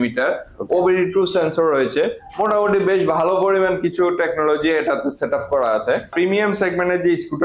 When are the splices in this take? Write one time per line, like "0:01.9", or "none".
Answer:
0:06.1

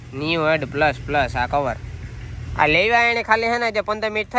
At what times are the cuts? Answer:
none

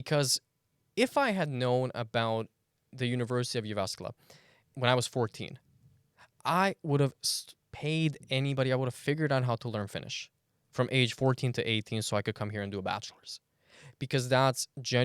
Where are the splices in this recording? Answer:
0:04.7

